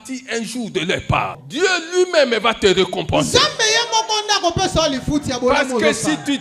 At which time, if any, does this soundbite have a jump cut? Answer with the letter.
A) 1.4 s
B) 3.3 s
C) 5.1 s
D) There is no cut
A